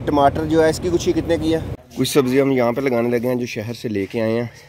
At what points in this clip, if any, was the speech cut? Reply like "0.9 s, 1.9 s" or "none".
1.7 s